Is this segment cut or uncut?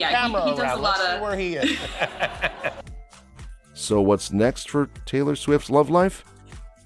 uncut